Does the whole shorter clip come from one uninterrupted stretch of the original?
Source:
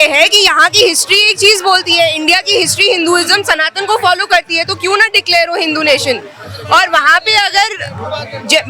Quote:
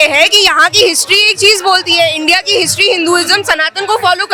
yes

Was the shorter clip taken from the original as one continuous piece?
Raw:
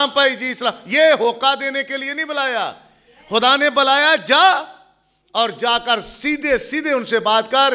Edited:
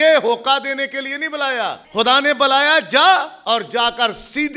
no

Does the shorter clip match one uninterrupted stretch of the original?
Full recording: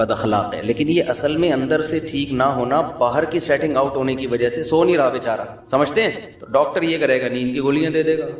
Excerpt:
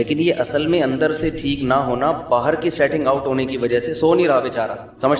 yes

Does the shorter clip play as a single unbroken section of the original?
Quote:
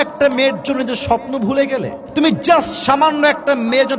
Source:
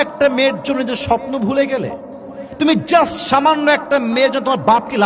no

